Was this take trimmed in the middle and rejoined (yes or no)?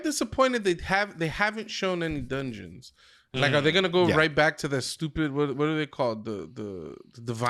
no